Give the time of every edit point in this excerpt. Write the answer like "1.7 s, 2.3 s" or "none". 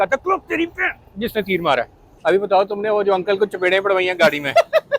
2.0 s